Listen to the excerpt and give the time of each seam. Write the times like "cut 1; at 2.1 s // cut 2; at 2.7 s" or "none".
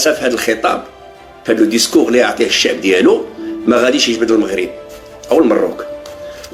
none